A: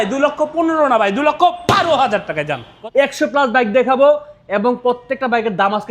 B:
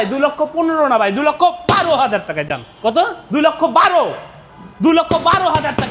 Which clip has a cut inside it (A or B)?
A